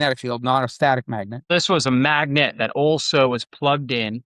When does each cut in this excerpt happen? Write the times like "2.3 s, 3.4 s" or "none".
1.5 s